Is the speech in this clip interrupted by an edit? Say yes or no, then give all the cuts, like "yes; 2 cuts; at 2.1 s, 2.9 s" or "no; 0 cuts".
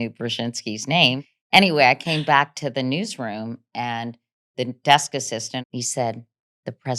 yes; 2 cuts; at 1.3 s, 5.7 s